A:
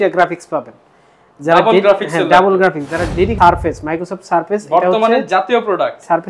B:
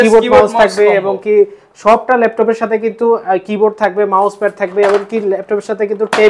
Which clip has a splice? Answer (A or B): A